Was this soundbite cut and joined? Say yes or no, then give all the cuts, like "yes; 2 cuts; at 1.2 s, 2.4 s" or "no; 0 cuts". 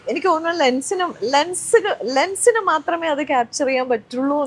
no; 0 cuts